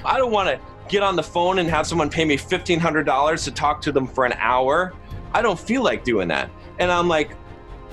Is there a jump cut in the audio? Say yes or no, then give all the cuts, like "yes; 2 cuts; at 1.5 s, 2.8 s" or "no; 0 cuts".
no; 0 cuts